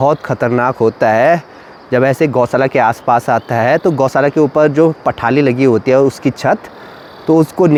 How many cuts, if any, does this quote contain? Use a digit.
0